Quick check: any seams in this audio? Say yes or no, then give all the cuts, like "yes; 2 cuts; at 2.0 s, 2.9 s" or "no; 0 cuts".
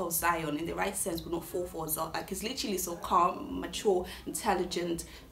no; 0 cuts